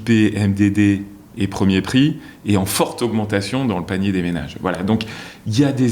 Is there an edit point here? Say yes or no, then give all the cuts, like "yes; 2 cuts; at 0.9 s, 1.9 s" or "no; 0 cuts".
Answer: no; 0 cuts